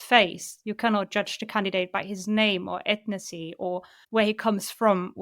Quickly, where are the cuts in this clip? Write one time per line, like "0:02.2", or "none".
0:03.9

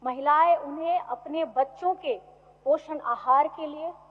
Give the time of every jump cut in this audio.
none

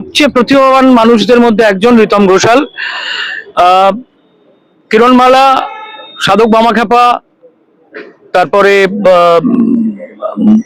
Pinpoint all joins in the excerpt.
none

